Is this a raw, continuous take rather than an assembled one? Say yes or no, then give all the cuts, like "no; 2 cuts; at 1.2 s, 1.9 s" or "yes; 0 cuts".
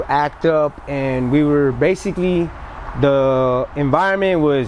yes; 0 cuts